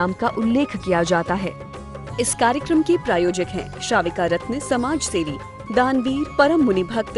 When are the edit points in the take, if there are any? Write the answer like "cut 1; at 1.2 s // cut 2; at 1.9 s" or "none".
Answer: cut 1; at 1.5 s